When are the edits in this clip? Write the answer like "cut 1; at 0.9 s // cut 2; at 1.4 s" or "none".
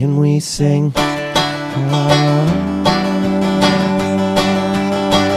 none